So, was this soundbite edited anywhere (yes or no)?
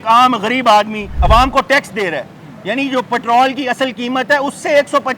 no